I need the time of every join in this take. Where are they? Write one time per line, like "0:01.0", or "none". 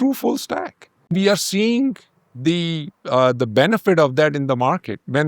0:01.1